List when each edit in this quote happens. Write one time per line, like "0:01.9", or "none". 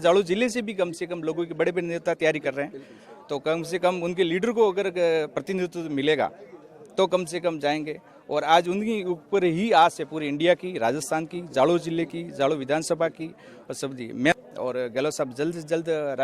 0:14.3